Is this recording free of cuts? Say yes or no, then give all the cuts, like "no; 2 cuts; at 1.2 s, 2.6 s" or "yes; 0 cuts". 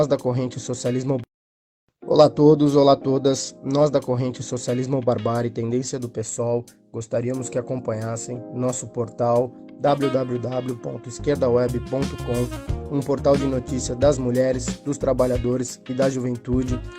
no; 2 cuts; at 1.2 s, 2.8 s